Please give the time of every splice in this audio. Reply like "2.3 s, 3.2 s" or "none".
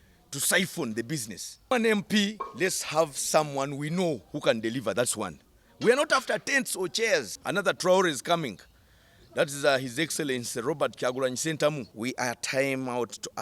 1.7 s, 7.4 s, 11.9 s